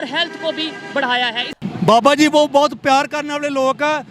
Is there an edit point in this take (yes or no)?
yes